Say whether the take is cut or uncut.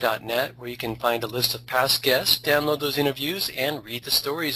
uncut